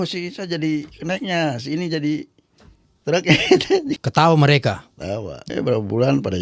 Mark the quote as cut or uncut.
cut